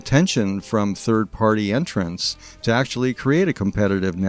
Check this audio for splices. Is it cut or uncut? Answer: uncut